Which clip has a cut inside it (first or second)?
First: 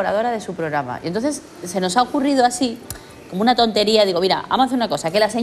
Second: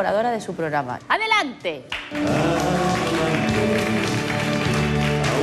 second